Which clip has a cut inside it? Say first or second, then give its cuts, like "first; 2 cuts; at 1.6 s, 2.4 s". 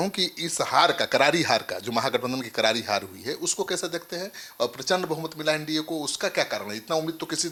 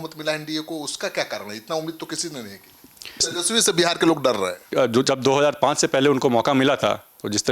second; 2 cuts; at 3.4 s, 4.7 s